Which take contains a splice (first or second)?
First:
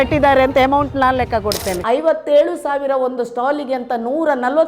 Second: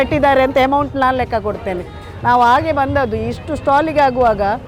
first